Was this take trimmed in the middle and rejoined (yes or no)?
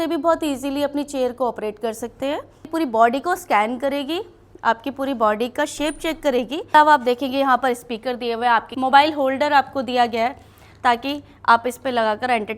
yes